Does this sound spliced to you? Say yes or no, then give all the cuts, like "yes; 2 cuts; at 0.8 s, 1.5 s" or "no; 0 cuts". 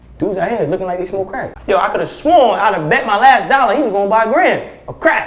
yes; 1 cut; at 1.4 s